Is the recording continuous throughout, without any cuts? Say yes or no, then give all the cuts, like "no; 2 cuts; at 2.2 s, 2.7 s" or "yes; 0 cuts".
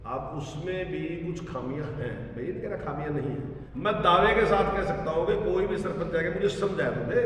no; 1 cut; at 3.6 s